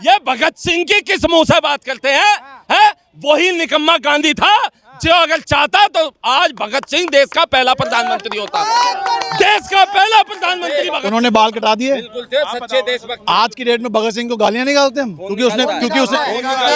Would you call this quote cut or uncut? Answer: cut